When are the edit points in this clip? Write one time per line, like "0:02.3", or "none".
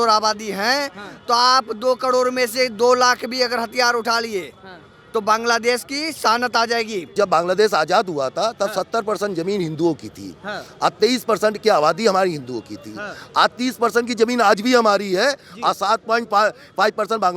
0:07.1